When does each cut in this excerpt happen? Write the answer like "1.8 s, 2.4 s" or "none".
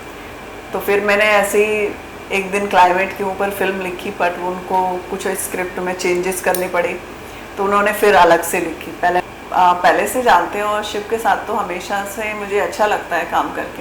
9.2 s